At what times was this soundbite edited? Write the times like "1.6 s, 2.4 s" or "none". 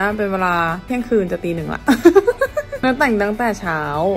2.7 s